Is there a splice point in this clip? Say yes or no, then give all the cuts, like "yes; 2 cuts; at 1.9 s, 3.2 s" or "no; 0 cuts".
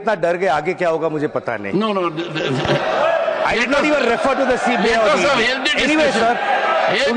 no; 0 cuts